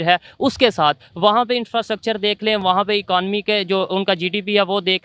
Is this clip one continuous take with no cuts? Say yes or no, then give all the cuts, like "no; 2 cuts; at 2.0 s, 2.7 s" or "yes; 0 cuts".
yes; 0 cuts